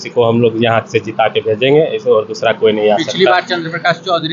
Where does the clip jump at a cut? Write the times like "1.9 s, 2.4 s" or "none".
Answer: none

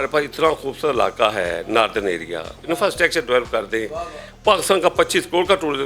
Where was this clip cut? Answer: none

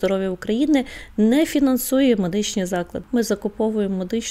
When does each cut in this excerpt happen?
3.0 s

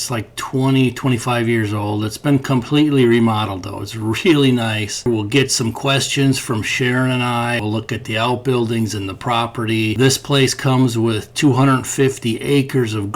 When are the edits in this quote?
5.1 s, 7.6 s, 9.9 s

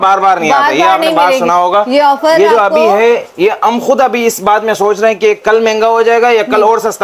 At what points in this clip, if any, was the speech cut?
none

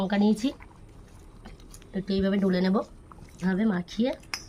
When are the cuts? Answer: 3.4 s

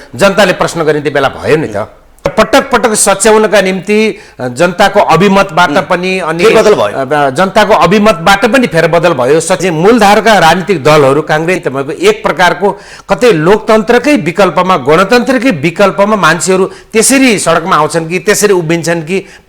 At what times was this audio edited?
2.3 s, 9.6 s, 11.6 s

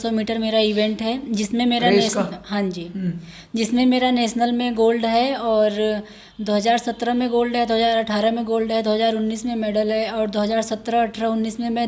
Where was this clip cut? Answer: none

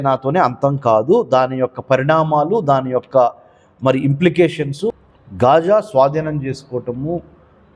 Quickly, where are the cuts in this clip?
5.1 s

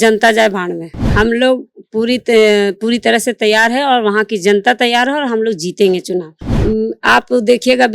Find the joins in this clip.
0.9 s, 6.4 s

